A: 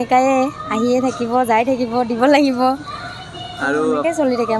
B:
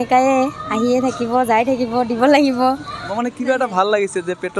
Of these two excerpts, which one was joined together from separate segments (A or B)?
B